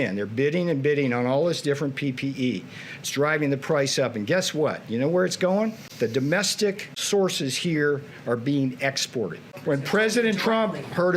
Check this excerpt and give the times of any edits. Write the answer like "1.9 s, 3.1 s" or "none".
5.8 s, 6.9 s